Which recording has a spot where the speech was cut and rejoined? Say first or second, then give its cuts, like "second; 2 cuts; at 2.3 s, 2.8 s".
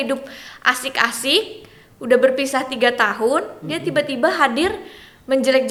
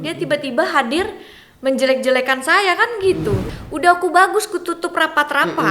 second; 1 cut; at 3.4 s